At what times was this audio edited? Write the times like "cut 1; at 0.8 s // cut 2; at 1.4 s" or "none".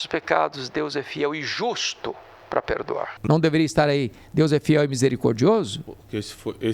cut 1; at 3.1 s